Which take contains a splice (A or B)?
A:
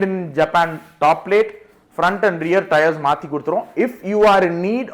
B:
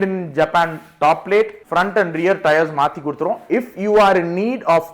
B